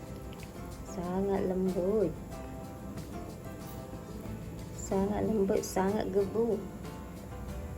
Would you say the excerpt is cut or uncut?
uncut